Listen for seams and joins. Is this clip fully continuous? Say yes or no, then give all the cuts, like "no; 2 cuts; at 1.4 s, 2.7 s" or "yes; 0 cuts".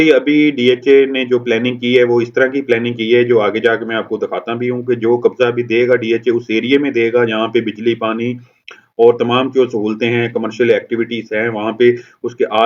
yes; 0 cuts